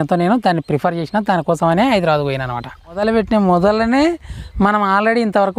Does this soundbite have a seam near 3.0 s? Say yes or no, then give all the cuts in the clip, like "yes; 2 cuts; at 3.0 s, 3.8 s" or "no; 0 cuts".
yes; 1 cut; at 3.0 s